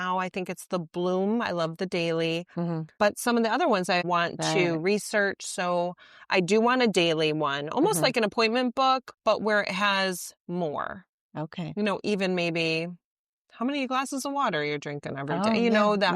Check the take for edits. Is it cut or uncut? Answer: cut